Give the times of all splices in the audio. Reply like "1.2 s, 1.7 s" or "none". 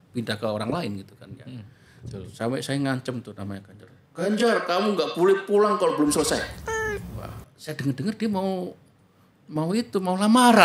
none